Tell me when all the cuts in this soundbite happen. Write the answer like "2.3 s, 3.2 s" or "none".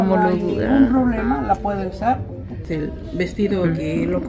2.6 s